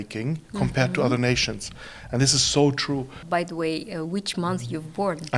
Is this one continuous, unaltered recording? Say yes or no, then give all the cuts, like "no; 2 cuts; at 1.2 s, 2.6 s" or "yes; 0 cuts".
no; 1 cut; at 3.1 s